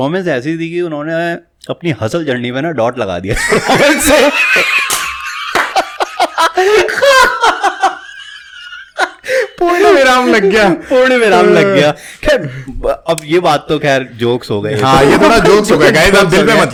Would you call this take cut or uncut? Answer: uncut